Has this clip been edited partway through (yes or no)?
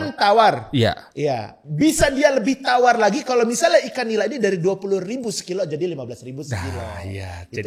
no